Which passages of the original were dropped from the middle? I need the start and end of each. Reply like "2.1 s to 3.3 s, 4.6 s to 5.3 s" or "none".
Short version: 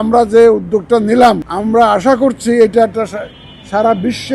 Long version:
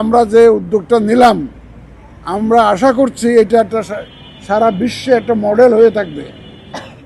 1.5 s to 2.3 s